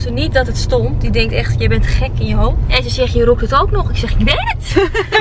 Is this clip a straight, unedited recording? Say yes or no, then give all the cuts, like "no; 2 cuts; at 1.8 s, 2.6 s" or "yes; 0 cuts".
yes; 0 cuts